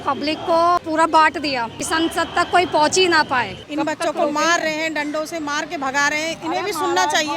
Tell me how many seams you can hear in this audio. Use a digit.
3